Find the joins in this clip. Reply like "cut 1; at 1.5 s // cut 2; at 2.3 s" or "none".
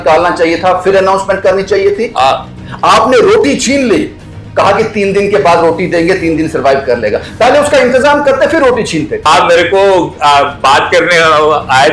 cut 1; at 9.2 s